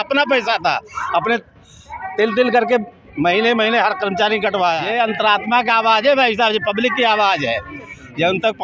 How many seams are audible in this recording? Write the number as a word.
one